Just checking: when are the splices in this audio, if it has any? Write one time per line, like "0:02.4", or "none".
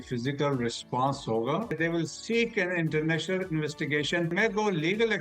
0:01.7
0:04.3